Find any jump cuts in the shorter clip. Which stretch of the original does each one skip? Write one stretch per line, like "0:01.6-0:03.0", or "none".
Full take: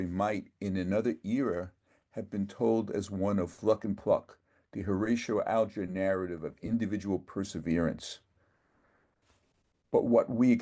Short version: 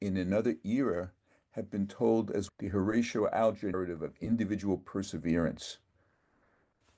0:03.1-0:04.6
0:05.9-0:06.2